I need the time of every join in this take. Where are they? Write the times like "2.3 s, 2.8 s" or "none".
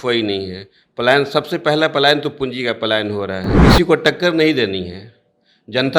3.5 s